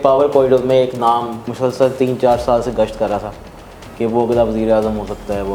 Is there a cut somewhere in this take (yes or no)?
no